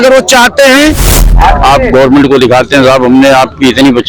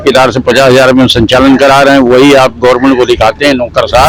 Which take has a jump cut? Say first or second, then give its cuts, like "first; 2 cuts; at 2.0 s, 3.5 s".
first; 1 cut; at 1.1 s